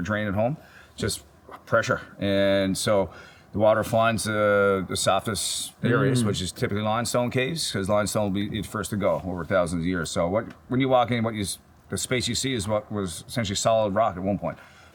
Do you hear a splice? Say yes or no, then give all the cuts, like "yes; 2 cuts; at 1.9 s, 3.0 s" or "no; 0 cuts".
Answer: no; 0 cuts